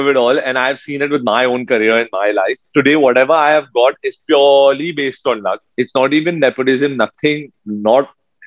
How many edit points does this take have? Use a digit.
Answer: 0